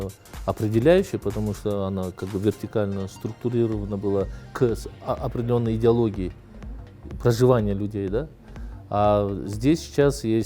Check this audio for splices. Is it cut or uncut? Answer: uncut